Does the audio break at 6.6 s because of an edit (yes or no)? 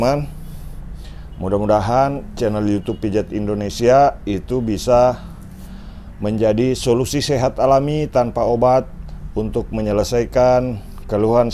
no